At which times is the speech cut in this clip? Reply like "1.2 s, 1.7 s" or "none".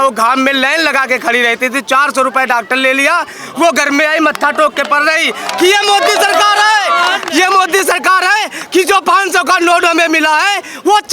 none